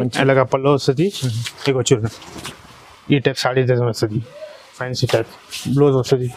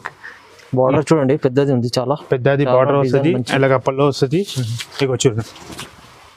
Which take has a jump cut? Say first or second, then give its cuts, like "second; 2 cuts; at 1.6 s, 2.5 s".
first; 1 cut; at 4.8 s